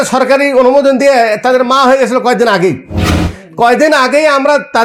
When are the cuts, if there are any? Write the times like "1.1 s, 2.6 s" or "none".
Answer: none